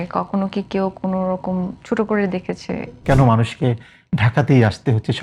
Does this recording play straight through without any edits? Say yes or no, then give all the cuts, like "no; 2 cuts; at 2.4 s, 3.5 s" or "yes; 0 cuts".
no; 1 cut; at 3.0 s